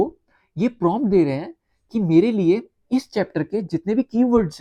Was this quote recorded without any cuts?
yes; 0 cuts

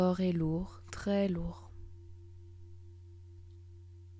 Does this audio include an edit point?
no; 0 cuts

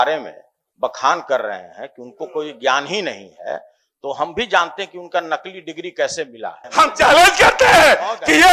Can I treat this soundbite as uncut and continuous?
no; 1 cut; at 6.6 s

